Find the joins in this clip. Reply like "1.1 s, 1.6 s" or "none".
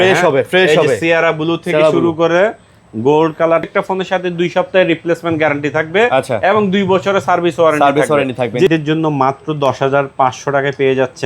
3.7 s, 8.7 s

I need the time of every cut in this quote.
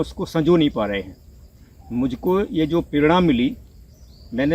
none

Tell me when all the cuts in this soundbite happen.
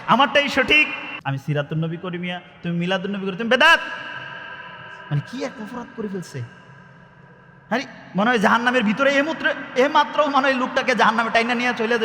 1.1 s

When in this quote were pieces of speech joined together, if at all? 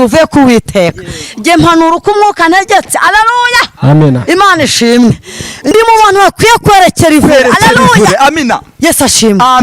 5.7 s

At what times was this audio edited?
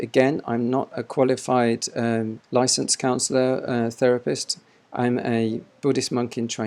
2.4 s, 4.8 s

